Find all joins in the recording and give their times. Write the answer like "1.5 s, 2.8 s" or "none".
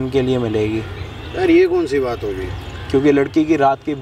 none